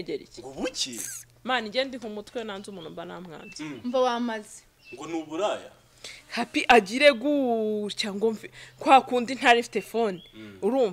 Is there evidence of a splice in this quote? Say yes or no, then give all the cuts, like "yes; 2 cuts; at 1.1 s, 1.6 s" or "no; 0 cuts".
no; 0 cuts